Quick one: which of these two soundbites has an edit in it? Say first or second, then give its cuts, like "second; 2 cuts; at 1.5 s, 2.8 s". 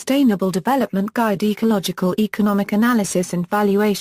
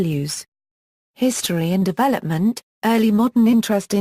first; 1 cut; at 1.4 s